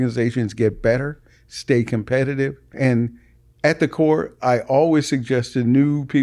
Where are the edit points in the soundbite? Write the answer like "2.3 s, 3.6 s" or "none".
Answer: 2.7 s